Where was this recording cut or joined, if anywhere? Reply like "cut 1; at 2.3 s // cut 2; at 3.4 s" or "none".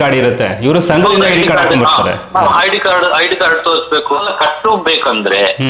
cut 1; at 4.3 s